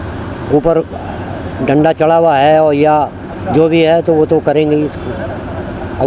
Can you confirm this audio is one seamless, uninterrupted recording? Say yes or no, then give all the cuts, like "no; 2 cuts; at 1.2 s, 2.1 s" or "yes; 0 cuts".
yes; 0 cuts